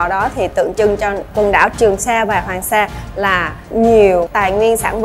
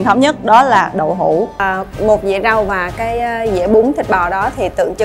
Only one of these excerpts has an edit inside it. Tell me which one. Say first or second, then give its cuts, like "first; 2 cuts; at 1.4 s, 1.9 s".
second; 1 cut; at 1.6 s